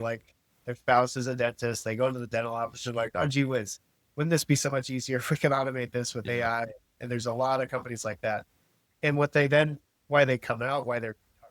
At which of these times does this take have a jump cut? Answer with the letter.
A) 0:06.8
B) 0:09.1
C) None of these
C